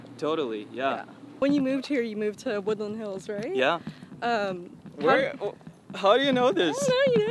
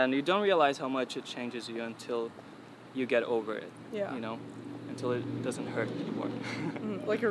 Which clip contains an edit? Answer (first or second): first